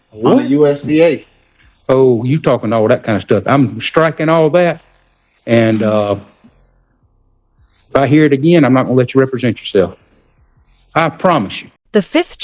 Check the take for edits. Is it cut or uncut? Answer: uncut